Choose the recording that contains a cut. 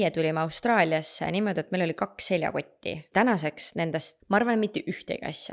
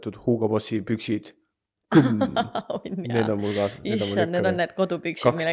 first; 2 cuts; at 3.0 s, 4.1 s

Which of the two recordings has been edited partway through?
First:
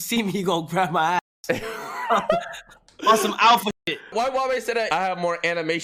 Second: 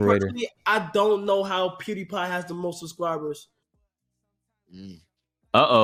first; 2 cuts; at 4.1 s, 4.9 s

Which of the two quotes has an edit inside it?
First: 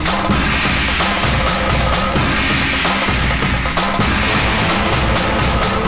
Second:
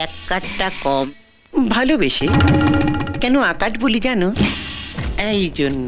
second; 2 cuts; at 1.1 s, 4.5 s

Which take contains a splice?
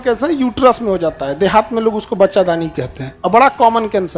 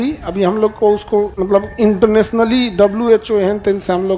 second; 1 cut; at 1.4 s

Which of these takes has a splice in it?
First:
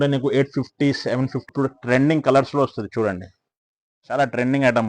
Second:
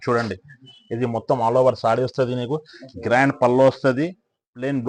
first; 1 cut; at 1.4 s

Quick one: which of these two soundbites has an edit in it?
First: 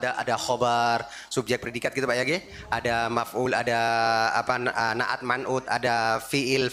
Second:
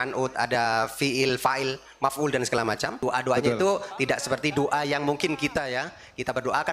second; 2 cuts; at 3.0 s, 3.9 s

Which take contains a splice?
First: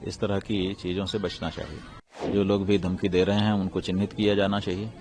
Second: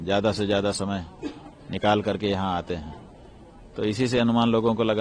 first; 1 cut; at 2.3 s

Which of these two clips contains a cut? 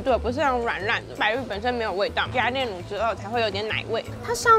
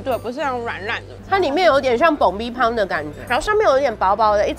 second; 2 cuts; at 1.2 s, 3.2 s

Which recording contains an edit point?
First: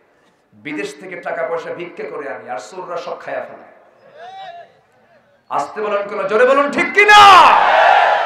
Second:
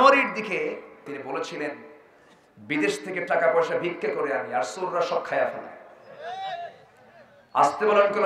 second; 1 cut; at 1.1 s

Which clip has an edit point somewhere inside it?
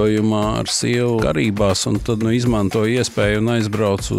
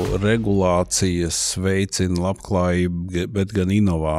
first; 2 cuts; at 1.2 s, 2.2 s

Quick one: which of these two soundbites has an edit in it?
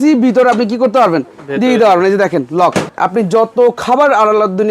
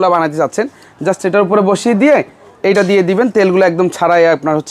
first; 1 cut; at 2.9 s

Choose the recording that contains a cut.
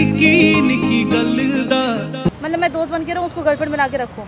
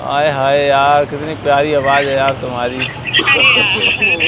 first; 1 cut; at 2.3 s

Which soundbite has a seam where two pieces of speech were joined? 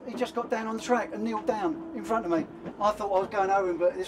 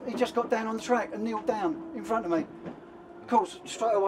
first; 1 cut; at 2.6 s

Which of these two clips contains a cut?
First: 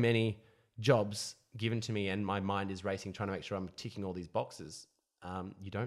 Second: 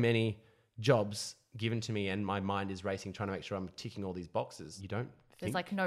second; 1 cut; at 4.8 s

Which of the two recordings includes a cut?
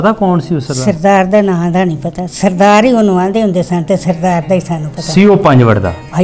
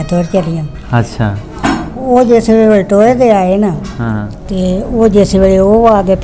second; 1 cut; at 4.4 s

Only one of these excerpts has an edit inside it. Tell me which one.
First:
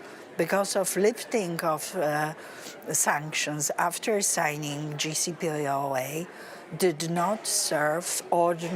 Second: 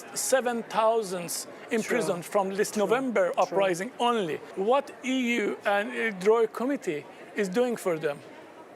second; 1 cut; at 4.5 s

